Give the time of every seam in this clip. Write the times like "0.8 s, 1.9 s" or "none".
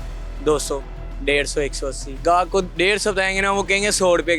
2.1 s